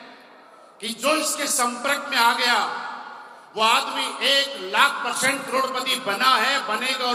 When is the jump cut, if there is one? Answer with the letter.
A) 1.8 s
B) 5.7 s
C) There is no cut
C